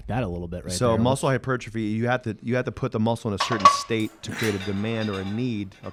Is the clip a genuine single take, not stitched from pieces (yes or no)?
yes